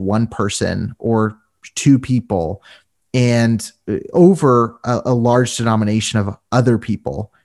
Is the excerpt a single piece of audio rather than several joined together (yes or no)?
yes